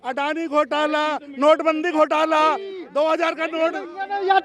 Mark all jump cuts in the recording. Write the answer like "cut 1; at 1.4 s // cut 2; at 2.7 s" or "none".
none